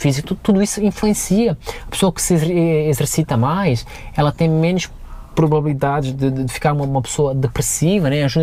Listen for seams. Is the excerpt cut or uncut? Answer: uncut